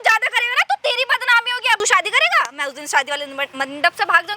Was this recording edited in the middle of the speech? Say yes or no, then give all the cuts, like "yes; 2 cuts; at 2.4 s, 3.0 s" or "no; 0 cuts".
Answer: yes; 1 cut; at 1.8 s